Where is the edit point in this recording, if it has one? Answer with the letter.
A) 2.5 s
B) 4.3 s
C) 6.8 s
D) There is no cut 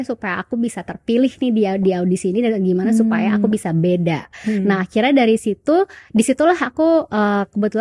D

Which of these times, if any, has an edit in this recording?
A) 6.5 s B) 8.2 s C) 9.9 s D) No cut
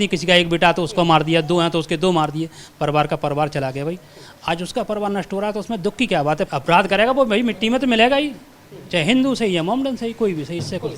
A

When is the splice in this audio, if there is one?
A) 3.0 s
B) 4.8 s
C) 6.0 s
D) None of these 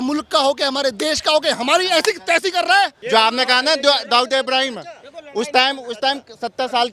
A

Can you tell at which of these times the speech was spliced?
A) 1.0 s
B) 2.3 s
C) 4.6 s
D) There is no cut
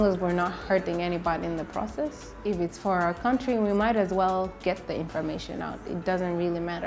B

